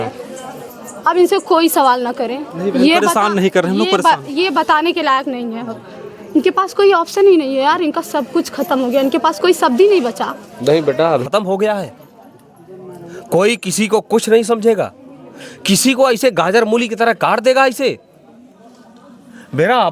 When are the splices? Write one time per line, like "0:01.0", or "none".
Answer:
0:11.2